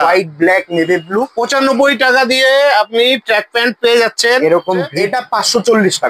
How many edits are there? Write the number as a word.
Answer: two